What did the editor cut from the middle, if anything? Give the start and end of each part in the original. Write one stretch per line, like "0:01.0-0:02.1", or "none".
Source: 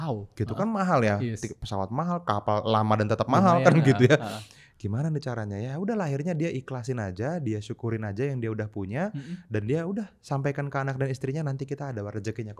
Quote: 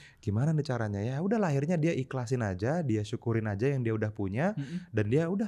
none